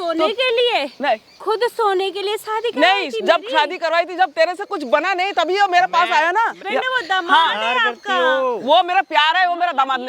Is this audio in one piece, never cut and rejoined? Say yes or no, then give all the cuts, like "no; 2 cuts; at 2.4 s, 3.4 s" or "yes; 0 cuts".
no; 1 cut; at 6.6 s